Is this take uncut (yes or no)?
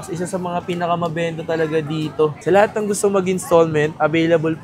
no